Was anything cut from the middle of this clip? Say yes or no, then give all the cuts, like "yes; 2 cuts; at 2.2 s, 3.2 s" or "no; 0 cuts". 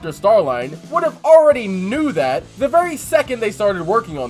no; 0 cuts